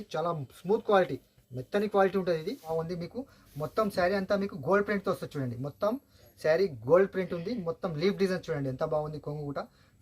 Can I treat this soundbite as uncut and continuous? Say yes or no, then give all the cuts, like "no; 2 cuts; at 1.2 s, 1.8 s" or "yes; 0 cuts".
no; 1 cut; at 2.7 s